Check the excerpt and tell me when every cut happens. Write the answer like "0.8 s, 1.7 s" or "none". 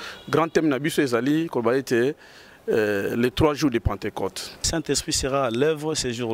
4.7 s